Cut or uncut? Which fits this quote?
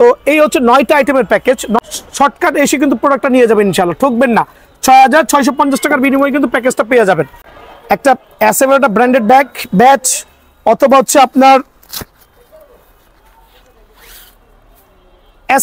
cut